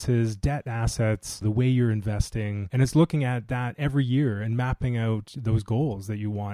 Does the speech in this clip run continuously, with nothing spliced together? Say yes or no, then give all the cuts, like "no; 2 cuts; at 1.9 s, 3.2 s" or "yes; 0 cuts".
no; 2 cuts; at 1.4 s, 2.6 s